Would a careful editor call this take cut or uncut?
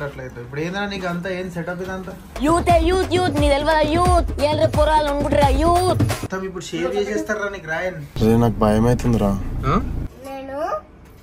cut